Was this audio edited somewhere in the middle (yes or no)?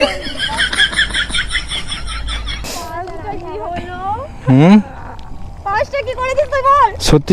yes